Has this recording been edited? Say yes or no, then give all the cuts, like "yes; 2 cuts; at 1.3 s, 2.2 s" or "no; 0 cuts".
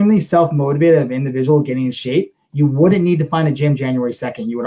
no; 0 cuts